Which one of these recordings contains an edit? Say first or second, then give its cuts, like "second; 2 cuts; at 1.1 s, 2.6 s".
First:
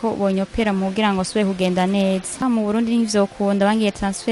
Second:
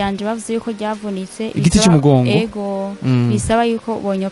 first; 1 cut; at 2.4 s